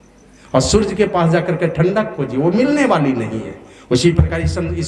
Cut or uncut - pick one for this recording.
uncut